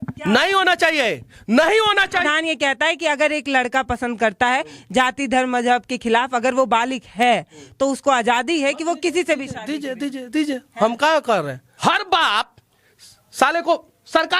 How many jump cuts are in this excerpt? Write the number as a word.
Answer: two